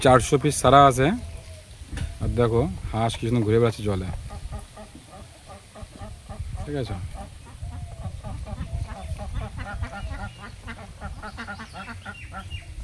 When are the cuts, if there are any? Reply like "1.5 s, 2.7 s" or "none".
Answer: none